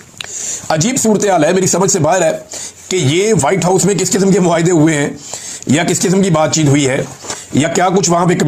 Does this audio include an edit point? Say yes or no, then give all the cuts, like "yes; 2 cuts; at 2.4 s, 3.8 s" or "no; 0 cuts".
no; 0 cuts